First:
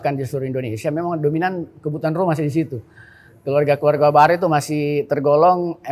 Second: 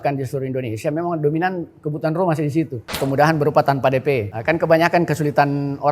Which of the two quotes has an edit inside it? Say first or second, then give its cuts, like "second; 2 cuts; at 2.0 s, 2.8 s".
second; 2 cuts; at 3.0 s, 4.3 s